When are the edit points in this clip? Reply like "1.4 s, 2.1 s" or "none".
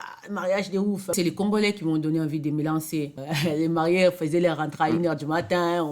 1.1 s, 3.1 s